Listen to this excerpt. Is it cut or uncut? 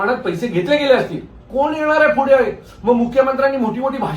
cut